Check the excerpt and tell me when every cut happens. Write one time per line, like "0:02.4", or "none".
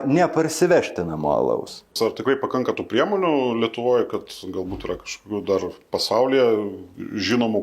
0:01.8